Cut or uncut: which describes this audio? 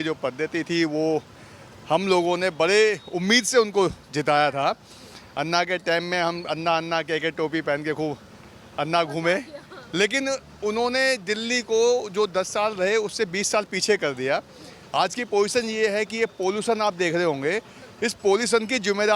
uncut